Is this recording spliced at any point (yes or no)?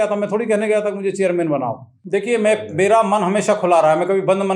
no